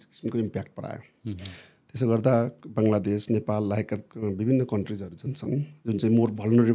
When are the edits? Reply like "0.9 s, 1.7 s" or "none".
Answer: none